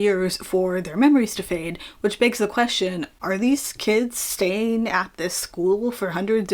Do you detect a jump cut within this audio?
no; 0 cuts

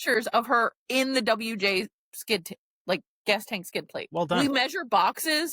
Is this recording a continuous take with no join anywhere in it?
no; 1 cut; at 4.4 s

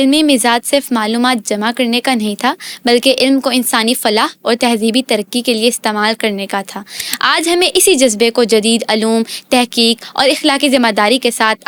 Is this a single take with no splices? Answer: yes; 0 cuts

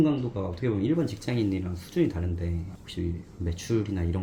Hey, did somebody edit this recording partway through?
no; 0 cuts

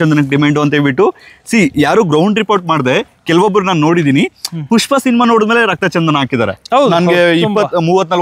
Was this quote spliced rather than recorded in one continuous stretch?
no; 0 cuts

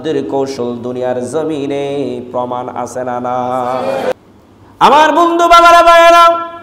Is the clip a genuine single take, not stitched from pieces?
no; 1 cut; at 4.1 s

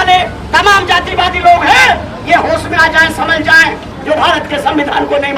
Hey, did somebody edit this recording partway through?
yes; 1 cut; at 3.9 s

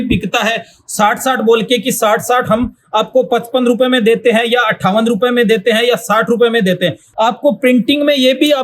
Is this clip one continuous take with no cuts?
no; 1 cut; at 7.0 s

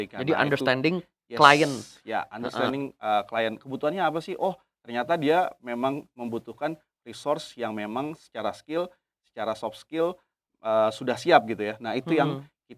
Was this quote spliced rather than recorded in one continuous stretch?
no; 0 cuts

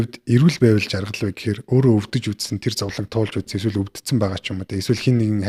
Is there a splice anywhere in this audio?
no; 0 cuts

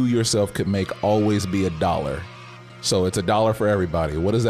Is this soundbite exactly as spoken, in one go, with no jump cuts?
yes; 0 cuts

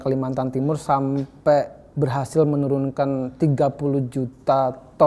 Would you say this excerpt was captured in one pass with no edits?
yes; 0 cuts

